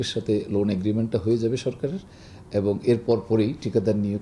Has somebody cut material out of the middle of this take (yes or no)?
no